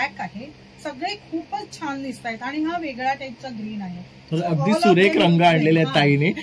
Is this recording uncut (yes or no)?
yes